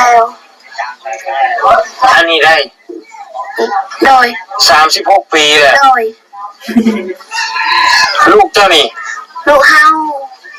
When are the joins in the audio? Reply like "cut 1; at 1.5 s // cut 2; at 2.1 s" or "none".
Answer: none